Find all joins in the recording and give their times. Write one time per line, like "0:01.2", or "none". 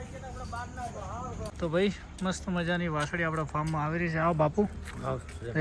0:01.5